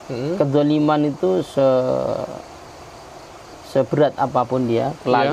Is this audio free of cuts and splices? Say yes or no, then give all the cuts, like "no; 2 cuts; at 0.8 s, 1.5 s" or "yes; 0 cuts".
yes; 0 cuts